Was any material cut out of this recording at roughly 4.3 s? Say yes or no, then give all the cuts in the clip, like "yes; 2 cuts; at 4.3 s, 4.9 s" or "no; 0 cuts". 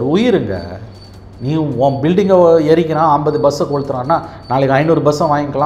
no; 0 cuts